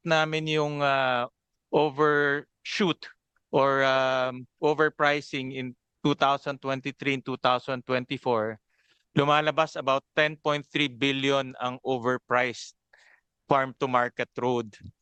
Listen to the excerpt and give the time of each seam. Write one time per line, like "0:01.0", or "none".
none